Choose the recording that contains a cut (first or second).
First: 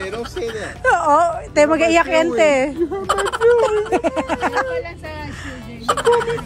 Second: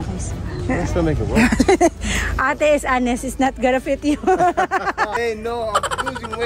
second